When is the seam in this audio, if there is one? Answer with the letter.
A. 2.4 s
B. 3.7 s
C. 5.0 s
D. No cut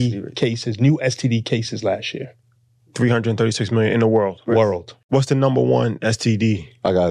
C